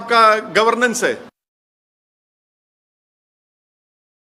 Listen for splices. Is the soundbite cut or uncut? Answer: uncut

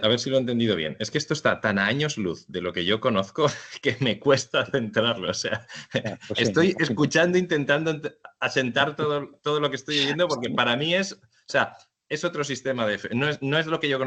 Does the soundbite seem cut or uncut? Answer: uncut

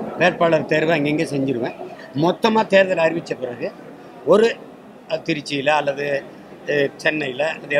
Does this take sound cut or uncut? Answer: uncut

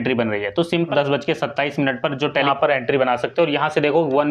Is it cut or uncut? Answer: cut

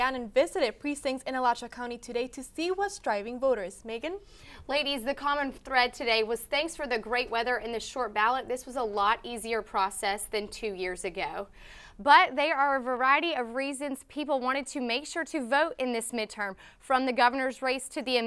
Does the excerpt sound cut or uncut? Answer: uncut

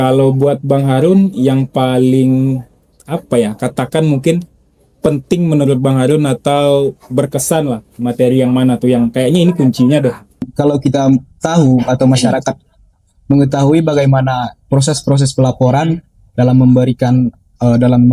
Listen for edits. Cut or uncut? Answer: cut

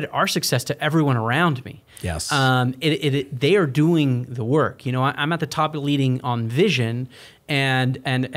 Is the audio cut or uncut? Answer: uncut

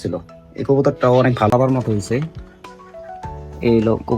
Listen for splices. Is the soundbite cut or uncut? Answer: cut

